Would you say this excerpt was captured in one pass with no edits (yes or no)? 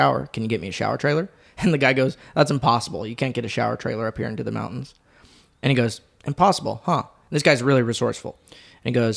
yes